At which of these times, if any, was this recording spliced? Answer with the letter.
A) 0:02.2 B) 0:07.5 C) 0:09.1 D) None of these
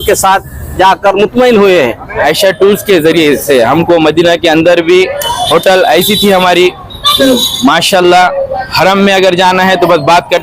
A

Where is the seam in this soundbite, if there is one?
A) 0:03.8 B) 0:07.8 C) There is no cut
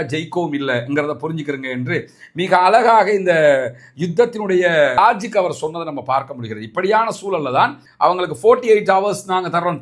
B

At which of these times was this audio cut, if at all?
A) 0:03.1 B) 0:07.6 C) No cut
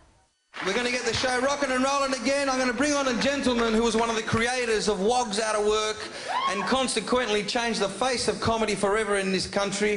A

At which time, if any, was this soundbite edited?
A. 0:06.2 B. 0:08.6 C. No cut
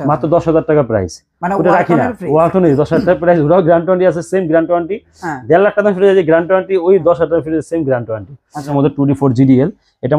B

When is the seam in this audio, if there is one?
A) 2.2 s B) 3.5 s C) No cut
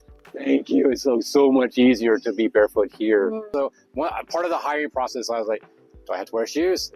B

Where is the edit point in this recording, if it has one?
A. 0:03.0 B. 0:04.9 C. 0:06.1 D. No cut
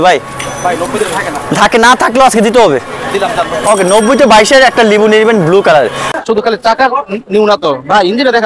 C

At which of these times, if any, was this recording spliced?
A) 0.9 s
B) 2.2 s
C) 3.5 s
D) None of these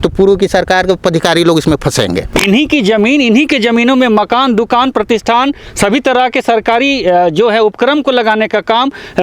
B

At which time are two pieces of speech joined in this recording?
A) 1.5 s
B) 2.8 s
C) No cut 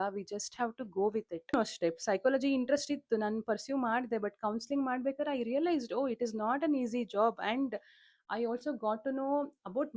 A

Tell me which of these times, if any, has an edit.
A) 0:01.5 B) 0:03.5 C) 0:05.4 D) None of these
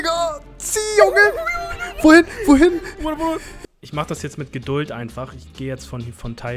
B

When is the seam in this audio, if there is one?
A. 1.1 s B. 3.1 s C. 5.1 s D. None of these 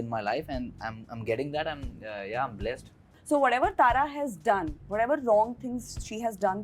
B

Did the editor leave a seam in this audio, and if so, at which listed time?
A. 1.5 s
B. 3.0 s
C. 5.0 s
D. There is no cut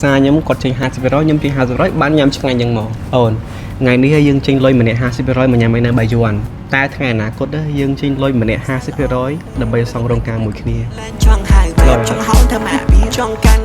B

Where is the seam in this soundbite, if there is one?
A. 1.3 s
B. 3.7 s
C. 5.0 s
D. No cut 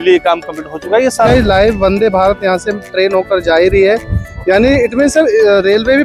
A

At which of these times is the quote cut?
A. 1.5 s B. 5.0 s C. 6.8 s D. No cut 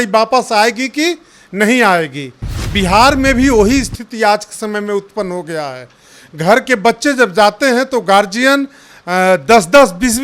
D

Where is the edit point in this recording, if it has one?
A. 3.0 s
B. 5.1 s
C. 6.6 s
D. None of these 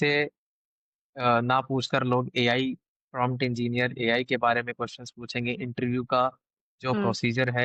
D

